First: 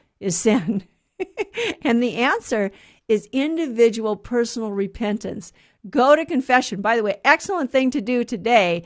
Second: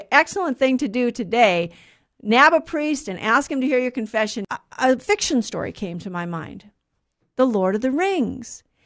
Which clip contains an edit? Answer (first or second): second